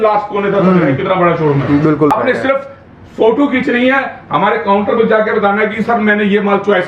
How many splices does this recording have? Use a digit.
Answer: 1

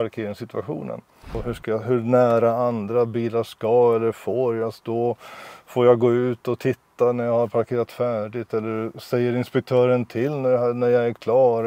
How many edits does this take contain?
1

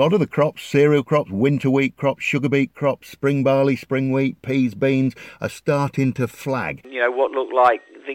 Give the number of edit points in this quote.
1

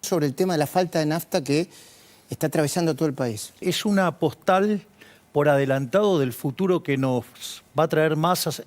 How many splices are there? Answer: 1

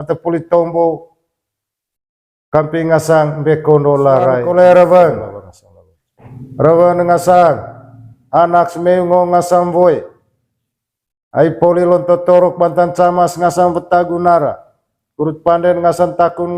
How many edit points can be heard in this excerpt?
1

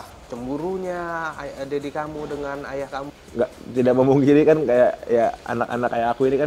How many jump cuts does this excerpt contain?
1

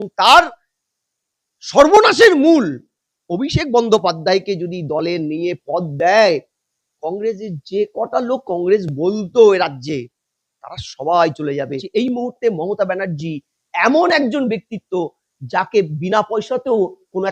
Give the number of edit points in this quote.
1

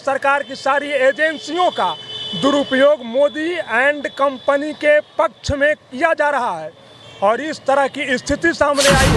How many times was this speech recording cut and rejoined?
0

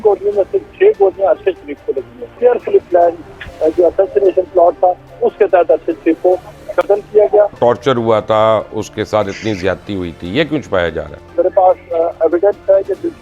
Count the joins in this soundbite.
3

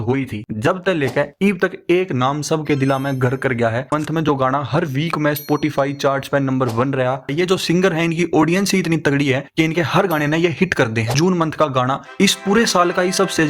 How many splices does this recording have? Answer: 3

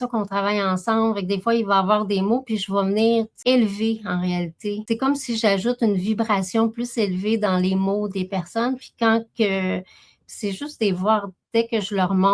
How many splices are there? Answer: 2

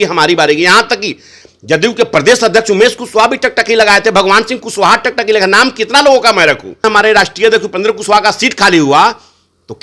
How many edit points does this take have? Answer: 1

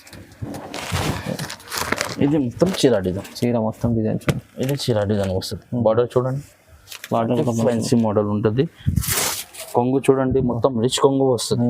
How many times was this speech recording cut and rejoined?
1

